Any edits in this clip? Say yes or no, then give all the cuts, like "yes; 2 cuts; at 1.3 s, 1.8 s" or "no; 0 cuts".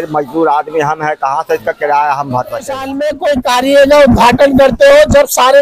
yes; 1 cut; at 3.1 s